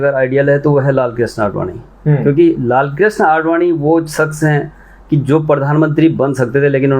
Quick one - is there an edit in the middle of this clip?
no; 0 cuts

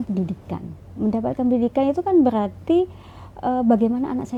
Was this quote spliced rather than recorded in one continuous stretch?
no; 0 cuts

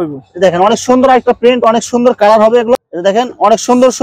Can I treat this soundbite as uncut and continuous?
no; 1 cut; at 2.8 s

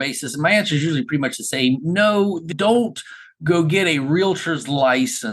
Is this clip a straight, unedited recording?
yes; 0 cuts

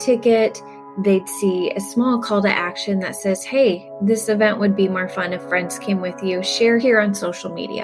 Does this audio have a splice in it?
yes; 1 cut; at 6.8 s

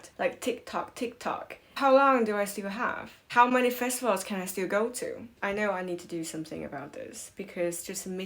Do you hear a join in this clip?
no; 0 cuts

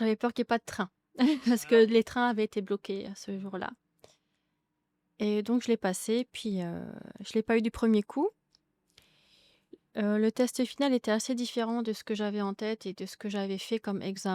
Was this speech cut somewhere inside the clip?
no; 0 cuts

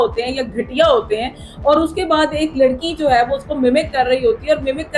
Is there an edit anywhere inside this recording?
no; 0 cuts

